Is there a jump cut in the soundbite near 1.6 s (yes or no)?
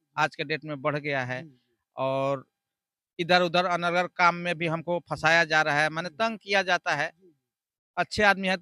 no